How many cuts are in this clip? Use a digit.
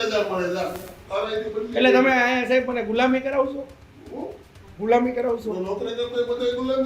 0